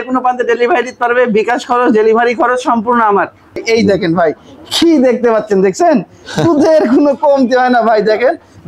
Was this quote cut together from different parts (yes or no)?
yes